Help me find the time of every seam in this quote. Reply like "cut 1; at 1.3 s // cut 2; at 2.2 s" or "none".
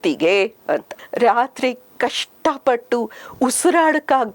cut 1; at 1.0 s